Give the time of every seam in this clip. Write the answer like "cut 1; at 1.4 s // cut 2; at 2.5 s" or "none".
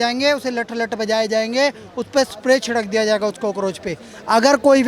none